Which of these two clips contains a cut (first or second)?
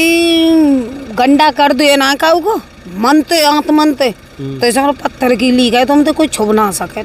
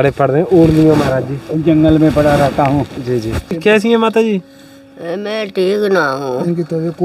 second